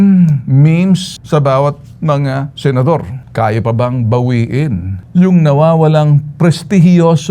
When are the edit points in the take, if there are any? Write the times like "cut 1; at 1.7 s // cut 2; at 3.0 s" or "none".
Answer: cut 1; at 1.1 s // cut 2; at 3.2 s // cut 3; at 4.9 s

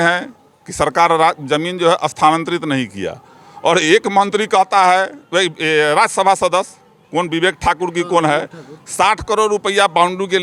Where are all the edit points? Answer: none

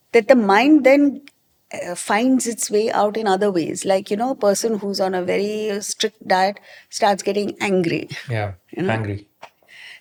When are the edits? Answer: none

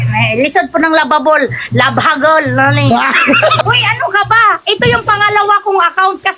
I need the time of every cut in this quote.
cut 1; at 3.6 s

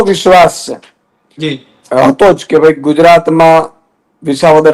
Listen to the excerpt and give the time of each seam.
none

